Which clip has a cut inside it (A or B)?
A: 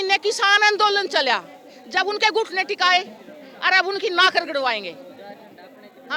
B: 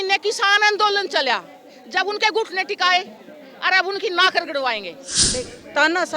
B